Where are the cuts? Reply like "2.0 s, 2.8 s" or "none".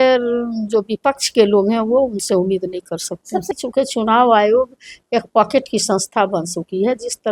3.5 s